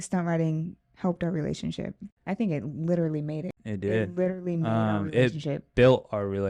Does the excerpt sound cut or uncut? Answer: cut